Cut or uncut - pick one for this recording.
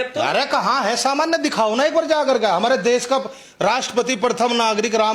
uncut